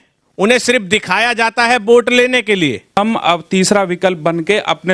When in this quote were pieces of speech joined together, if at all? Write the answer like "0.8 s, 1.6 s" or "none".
3.0 s